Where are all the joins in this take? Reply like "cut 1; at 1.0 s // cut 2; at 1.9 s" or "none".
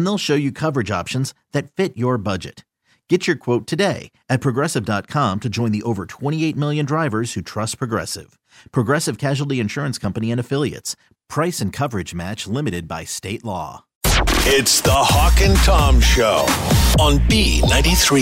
cut 1; at 14.0 s